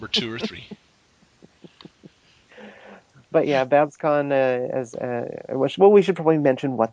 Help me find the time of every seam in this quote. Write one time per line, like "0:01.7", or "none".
none